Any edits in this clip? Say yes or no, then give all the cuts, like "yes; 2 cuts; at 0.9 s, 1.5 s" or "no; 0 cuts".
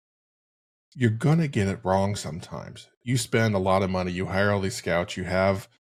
no; 0 cuts